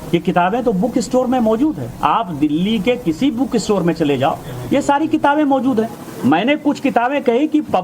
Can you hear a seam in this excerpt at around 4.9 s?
yes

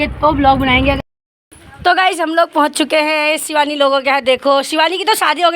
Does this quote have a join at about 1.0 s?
yes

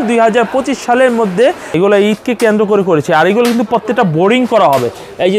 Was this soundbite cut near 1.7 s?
yes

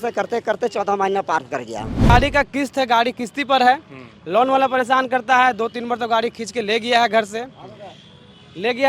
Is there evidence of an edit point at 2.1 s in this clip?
yes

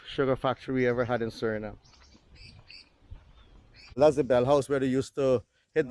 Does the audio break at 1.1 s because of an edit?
no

